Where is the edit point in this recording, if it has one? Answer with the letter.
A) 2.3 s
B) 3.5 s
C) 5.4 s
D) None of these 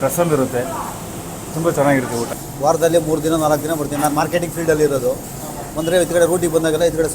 A